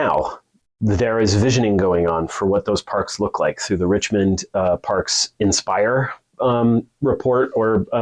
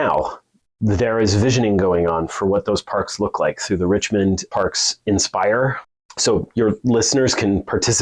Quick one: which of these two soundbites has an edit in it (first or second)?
second